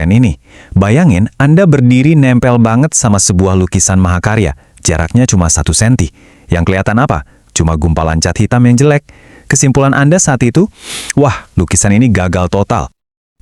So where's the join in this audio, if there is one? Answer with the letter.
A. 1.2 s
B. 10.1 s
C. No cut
C